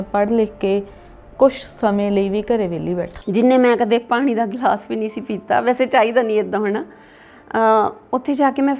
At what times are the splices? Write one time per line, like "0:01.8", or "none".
0:03.1